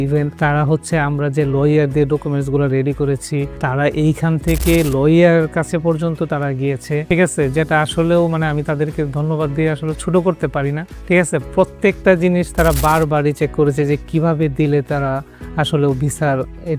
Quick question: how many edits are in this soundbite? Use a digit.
0